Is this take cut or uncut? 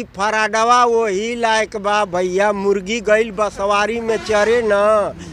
uncut